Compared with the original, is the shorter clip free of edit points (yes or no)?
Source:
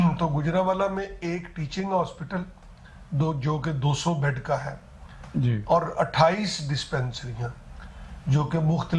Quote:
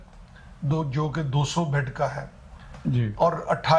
yes